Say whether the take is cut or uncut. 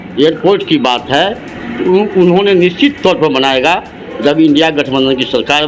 uncut